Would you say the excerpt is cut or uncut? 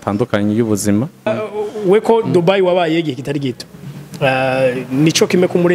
cut